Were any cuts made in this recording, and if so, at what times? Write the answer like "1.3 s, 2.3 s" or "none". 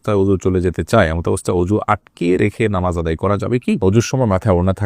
3.8 s